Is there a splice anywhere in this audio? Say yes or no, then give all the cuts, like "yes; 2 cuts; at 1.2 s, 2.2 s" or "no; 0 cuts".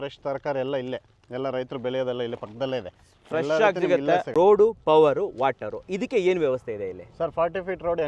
yes; 1 cut; at 4.3 s